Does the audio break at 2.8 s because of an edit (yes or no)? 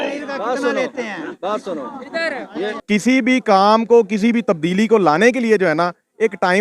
yes